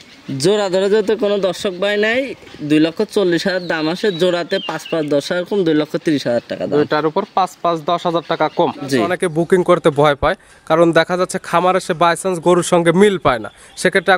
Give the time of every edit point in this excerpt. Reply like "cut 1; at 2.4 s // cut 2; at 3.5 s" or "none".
cut 1; at 9.1 s

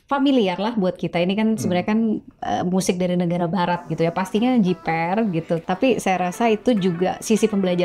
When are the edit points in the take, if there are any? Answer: cut 1; at 5.6 s

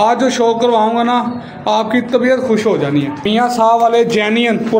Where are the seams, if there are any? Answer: cut 1; at 3.3 s

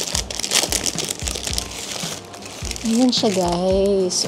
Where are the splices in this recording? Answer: cut 1; at 1.6 s

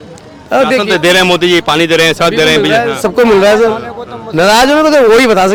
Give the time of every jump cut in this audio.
none

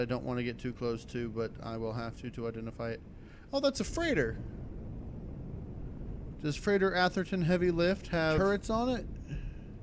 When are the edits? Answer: cut 1; at 8.4 s

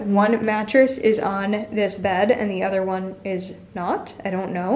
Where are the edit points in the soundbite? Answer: none

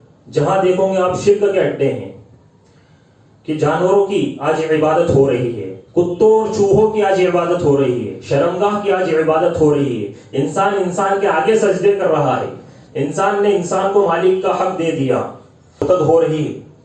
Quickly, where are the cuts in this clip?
cut 1; at 15.8 s

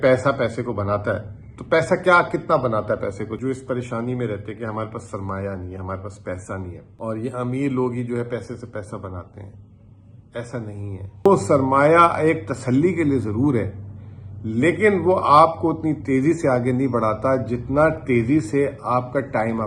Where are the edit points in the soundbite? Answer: cut 1; at 3.3 s // cut 2; at 6.8 s // cut 3; at 11.2 s

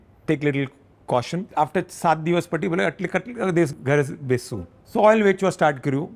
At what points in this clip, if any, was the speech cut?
cut 1; at 1.5 s // cut 2; at 3.7 s // cut 3; at 4.8 s

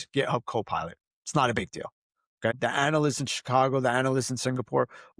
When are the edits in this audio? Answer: cut 1; at 2.5 s

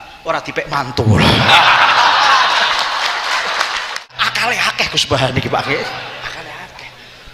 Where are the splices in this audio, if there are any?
cut 1; at 4.1 s

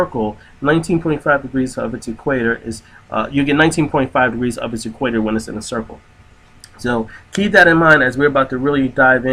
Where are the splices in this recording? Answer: cut 1; at 2.3 s

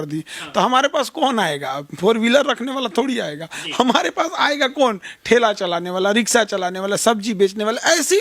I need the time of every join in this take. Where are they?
none

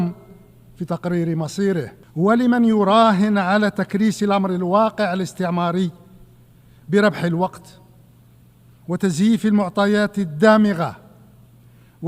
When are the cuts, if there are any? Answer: cut 1; at 2.0 s

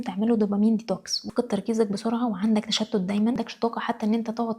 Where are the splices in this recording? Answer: cut 1; at 1.2 s // cut 2; at 3.4 s

